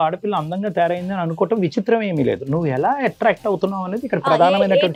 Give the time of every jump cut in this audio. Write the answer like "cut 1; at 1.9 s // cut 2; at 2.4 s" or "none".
none